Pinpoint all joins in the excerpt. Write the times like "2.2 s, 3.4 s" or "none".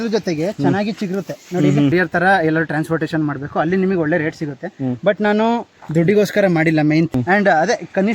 1.9 s, 7.1 s